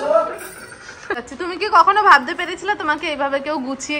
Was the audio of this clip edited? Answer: yes; 1 cut; at 1.2 s

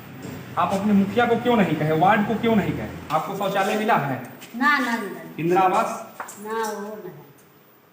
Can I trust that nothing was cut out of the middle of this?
no; 1 cut; at 2.9 s

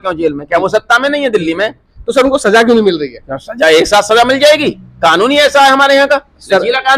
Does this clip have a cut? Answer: no; 0 cuts

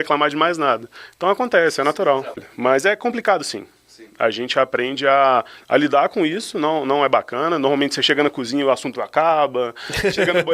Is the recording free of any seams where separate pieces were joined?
no; 1 cut; at 2.4 s

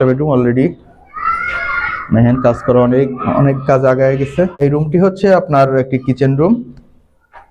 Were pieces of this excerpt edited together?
yes; 1 cut; at 4.6 s

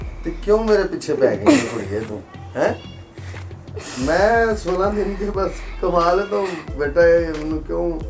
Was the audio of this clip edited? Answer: no; 0 cuts

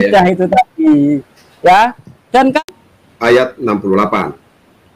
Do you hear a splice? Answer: yes; 1 cut; at 2.6 s

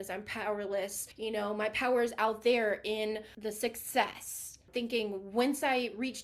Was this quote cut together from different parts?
yes; 3 cuts; at 1.0 s, 3.3 s, 4.7 s

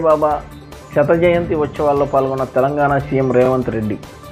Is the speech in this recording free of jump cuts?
yes; 0 cuts

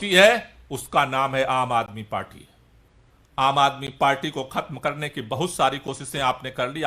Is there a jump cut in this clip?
no; 0 cuts

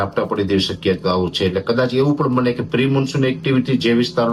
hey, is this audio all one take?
yes; 0 cuts

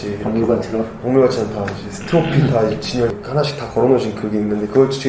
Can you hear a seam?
yes; 1 cut; at 3.1 s

